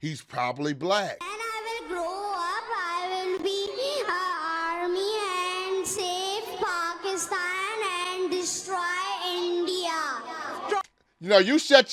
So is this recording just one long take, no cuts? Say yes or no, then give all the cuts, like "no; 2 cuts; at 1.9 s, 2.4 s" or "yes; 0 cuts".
no; 1 cut; at 1.4 s